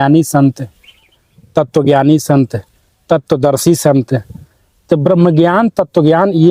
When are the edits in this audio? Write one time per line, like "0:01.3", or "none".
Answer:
none